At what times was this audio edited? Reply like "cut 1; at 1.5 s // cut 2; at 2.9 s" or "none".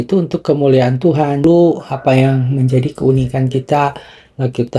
cut 1; at 1.4 s